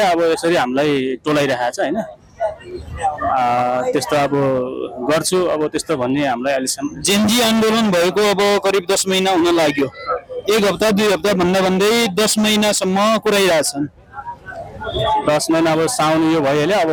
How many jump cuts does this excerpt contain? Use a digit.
0